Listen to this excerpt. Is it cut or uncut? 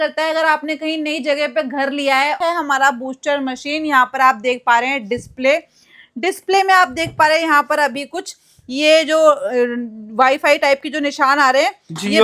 cut